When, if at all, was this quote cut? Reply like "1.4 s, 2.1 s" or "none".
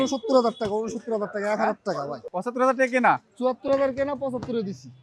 2.2 s

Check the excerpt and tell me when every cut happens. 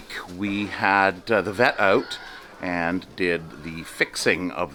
none

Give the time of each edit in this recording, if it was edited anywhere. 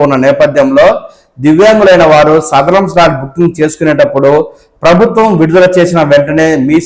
none

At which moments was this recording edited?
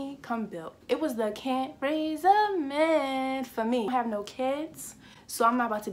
0.9 s, 3.9 s

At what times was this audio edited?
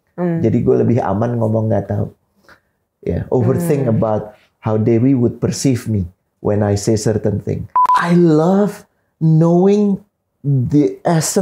7.8 s

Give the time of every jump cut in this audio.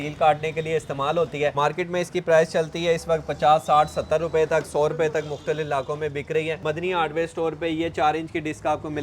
1.5 s, 6.6 s

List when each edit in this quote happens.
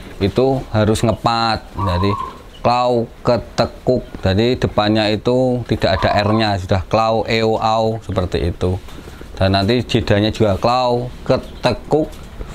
none

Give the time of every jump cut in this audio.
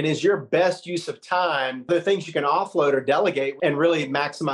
1.9 s, 3.5 s

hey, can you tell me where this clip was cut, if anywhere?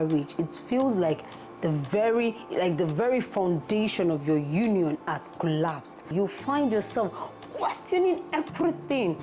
6.1 s

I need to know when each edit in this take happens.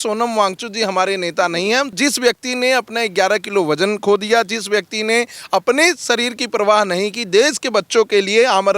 1.9 s

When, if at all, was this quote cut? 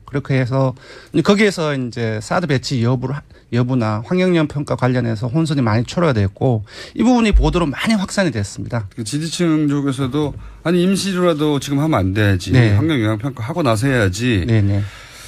none

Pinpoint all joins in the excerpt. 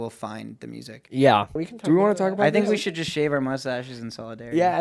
1.6 s

